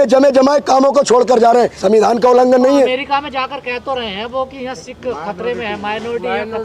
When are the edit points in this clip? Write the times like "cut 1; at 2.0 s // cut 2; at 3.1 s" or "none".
none